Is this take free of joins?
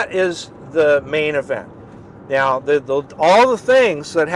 yes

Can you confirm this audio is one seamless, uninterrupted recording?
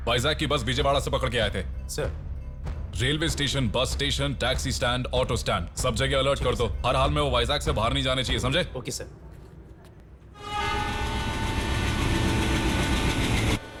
yes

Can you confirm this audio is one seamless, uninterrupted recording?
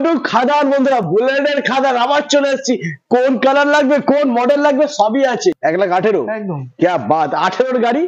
no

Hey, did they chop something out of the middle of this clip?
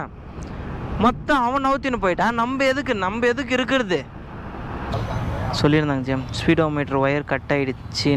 yes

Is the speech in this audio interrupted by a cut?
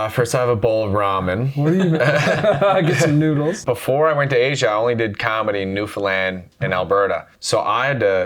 yes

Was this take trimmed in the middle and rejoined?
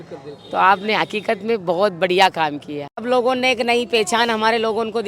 yes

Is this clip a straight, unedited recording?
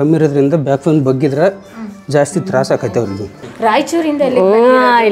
no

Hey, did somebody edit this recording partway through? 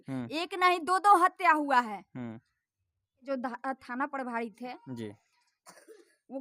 yes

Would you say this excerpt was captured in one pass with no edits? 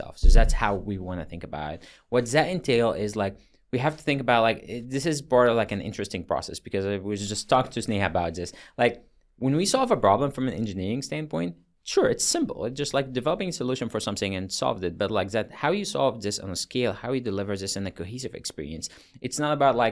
yes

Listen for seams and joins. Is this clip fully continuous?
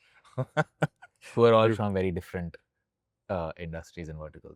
yes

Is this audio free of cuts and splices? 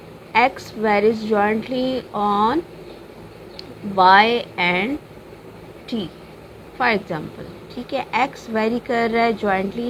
yes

